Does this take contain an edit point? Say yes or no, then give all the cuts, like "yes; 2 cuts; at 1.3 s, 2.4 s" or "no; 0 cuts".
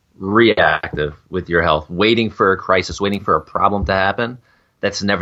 no; 0 cuts